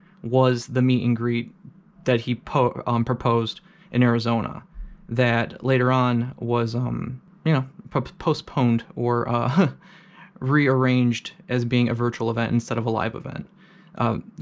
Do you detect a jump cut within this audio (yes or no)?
yes